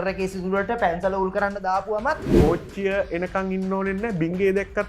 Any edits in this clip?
yes; 1 cut; at 2.3 s

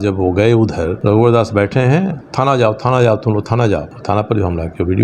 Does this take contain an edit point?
yes; 3 cuts; at 0.9 s, 2.2 s, 3.9 s

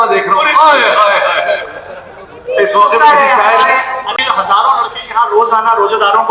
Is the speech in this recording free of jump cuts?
no; 1 cut; at 4.1 s

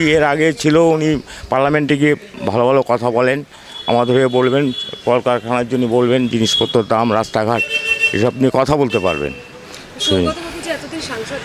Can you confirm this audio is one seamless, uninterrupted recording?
yes; 0 cuts

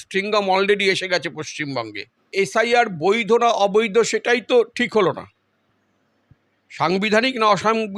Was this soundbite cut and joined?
yes; 1 cut; at 2.3 s

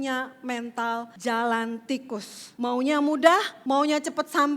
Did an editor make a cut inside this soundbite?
yes; 3 cuts; at 1.1 s, 2.4 s, 3.5 s

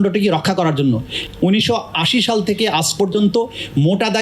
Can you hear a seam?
yes; 1 cut; at 1.2 s

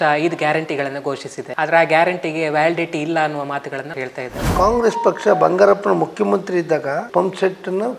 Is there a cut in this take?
yes; 3 cuts; at 1.4 s, 4.4 s, 7.1 s

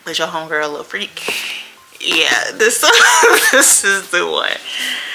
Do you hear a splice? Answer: no; 0 cuts

